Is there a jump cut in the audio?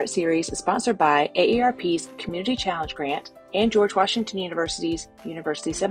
no; 0 cuts

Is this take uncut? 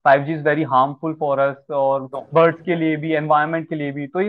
yes; 0 cuts

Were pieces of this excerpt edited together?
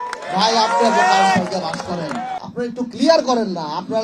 yes; 1 cut; at 2.4 s

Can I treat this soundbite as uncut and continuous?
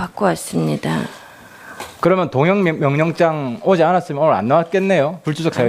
no; 1 cut; at 4.5 s

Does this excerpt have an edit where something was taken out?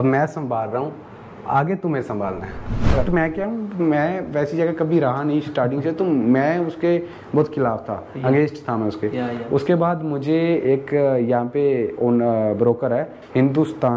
yes; 1 cut; at 2.9 s

